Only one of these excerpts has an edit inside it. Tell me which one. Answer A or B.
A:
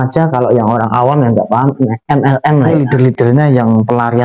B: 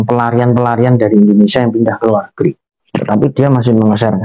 A